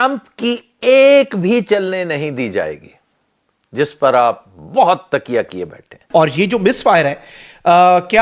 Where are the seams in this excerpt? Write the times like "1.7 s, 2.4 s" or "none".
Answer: 6.0 s